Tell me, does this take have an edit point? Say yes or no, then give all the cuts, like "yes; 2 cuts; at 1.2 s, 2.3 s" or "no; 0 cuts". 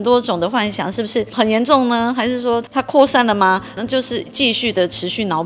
yes; 3 cuts; at 1.3 s, 2.7 s, 3.7 s